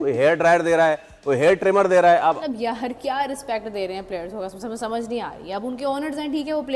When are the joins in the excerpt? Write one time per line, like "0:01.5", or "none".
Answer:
0:02.4